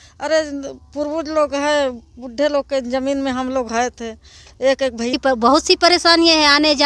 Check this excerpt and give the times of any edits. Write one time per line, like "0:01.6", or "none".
0:05.1